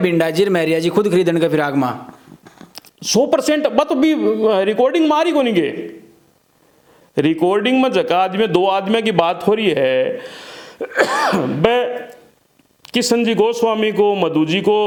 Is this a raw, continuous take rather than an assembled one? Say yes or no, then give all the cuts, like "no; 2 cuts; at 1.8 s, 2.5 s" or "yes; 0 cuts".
yes; 0 cuts